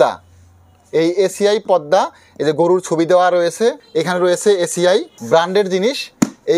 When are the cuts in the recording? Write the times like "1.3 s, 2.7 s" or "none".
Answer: 3.8 s, 5.1 s